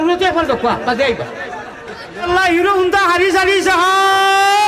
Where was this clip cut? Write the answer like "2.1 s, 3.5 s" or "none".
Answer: 2.2 s